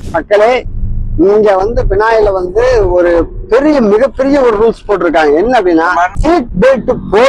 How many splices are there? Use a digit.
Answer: 1